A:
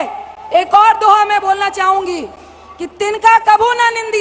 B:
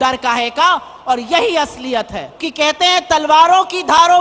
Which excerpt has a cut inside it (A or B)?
B